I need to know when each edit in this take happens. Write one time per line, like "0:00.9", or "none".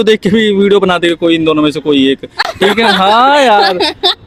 none